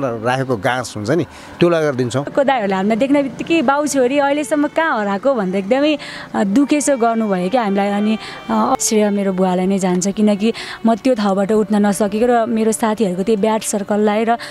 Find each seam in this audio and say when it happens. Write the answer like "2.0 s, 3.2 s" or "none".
2.3 s, 8.8 s